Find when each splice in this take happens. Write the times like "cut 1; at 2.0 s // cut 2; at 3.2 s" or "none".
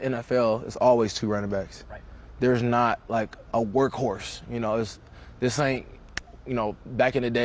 none